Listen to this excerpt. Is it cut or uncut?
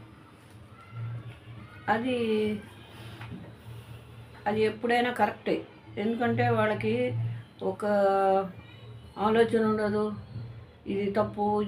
uncut